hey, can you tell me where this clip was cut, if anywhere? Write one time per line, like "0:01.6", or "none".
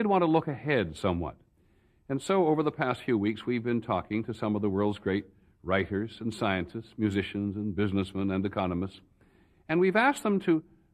none